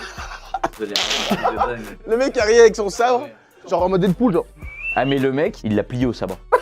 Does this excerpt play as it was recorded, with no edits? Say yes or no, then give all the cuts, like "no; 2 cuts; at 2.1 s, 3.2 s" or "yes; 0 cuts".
no; 1 cut; at 5.6 s